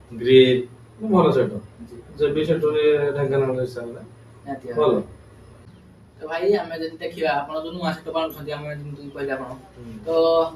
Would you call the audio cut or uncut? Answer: cut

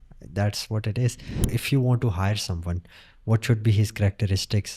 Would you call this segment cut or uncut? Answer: cut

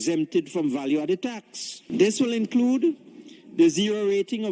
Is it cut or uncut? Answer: cut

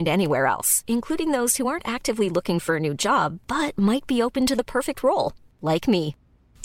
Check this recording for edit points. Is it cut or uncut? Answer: uncut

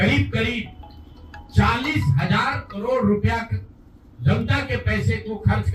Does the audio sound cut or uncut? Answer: uncut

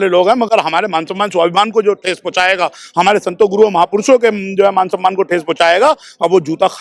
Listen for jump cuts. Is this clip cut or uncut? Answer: uncut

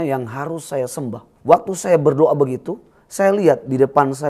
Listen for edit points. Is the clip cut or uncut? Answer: cut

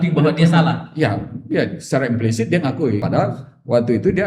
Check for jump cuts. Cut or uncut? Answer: cut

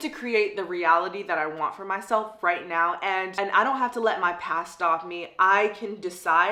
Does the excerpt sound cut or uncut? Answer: uncut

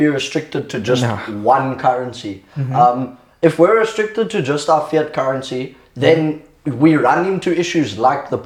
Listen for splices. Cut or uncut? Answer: uncut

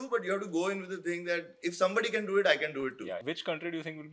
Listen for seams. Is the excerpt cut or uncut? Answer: cut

